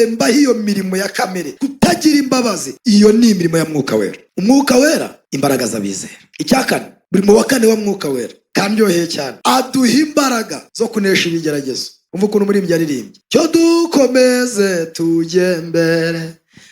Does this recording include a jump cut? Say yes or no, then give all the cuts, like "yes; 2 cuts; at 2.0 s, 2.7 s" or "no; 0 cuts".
yes; 2 cuts; at 1.5 s, 2.7 s